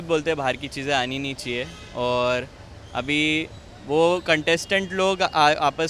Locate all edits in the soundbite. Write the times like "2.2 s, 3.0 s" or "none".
none